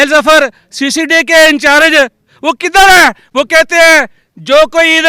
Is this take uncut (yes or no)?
yes